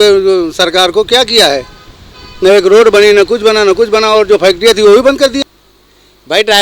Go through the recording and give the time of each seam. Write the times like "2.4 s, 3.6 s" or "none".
5.4 s